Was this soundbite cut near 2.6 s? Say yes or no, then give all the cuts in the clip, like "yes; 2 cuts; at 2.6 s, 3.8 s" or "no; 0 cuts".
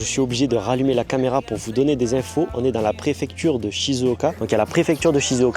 no; 1 cut; at 4.3 s